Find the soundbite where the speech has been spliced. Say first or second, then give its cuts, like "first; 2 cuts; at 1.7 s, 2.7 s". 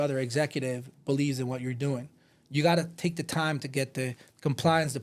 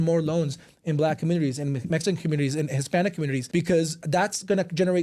second; 2 cuts; at 3.4 s, 4.0 s